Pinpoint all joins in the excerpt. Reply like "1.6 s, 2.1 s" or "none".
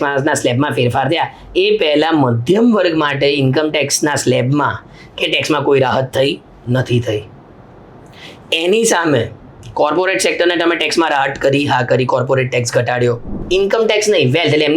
13.3 s